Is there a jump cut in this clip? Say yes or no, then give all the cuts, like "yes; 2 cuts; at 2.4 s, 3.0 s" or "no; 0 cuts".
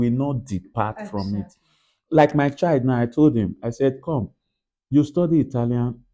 no; 0 cuts